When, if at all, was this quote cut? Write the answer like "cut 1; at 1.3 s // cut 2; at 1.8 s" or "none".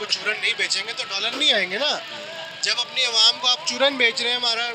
none